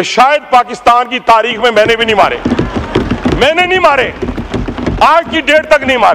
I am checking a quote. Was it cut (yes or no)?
no